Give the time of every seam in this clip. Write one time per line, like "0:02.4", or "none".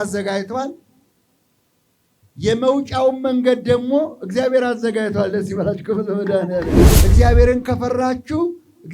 0:06.9